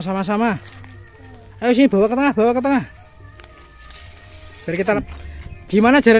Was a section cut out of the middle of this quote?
yes; 1 cut; at 5.0 s

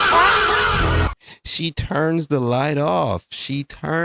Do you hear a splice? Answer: no; 0 cuts

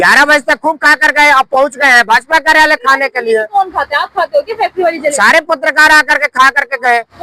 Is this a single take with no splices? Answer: yes; 0 cuts

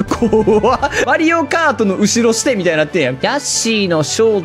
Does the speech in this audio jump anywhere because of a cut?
yes; 1 cut; at 3.2 s

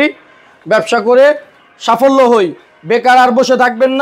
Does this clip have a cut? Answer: no; 0 cuts

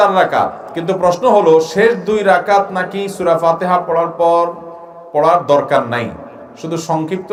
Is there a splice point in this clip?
no; 0 cuts

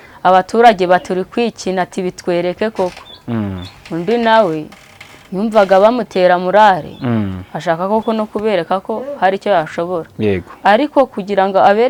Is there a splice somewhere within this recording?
no; 0 cuts

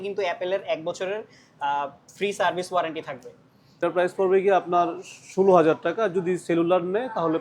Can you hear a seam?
yes; 1 cut; at 3.8 s

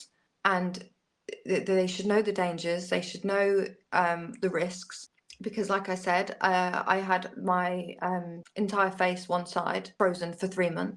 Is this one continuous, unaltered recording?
no; 1 cut; at 9.9 s

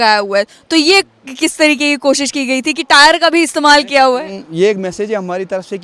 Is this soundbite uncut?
yes; 0 cuts

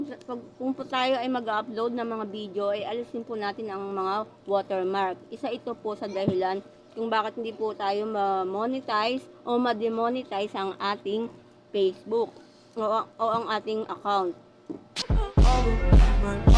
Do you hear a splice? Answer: yes; 1 cut; at 14.9 s

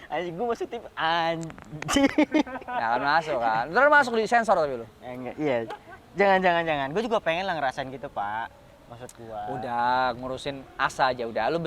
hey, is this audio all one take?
yes; 0 cuts

